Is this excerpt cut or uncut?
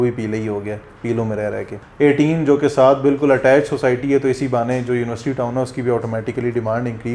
cut